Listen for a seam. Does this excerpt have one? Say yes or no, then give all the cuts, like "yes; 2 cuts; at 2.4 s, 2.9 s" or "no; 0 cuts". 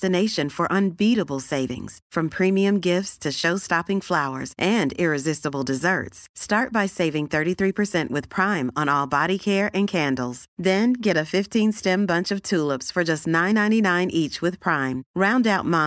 no; 0 cuts